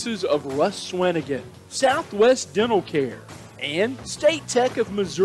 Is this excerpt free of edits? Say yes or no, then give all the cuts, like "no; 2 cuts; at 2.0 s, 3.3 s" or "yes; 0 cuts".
yes; 0 cuts